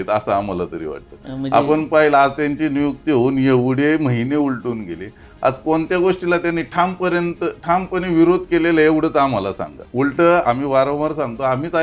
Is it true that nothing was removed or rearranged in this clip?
no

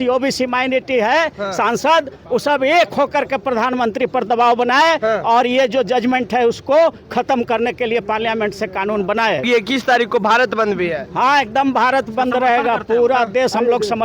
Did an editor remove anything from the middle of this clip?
yes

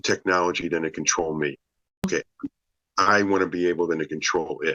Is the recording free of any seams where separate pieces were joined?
no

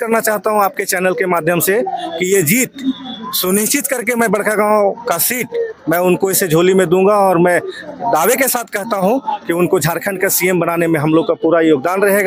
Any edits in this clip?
no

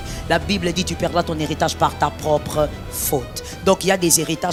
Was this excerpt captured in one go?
yes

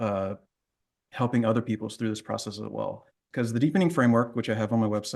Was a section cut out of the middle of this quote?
yes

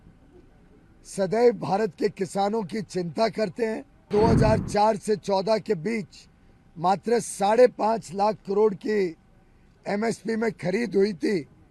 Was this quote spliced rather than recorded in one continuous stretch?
yes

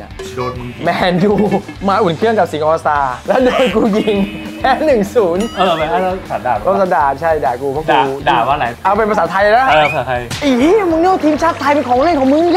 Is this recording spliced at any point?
yes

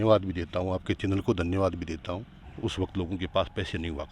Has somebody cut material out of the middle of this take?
yes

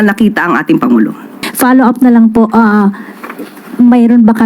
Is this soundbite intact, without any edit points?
no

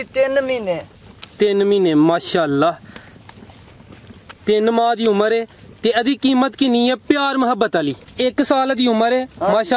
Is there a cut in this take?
yes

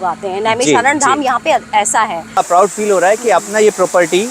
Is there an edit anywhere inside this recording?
yes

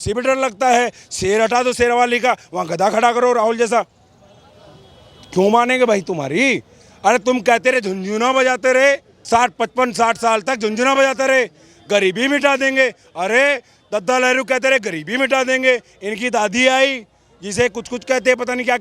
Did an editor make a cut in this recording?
no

